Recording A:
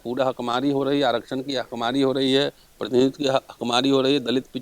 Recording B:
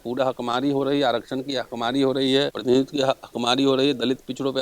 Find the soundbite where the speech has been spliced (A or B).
B